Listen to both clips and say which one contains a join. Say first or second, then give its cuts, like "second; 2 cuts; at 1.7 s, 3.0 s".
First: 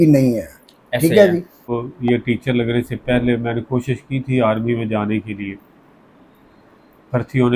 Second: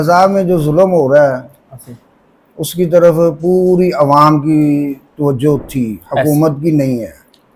first; 1 cut; at 1.9 s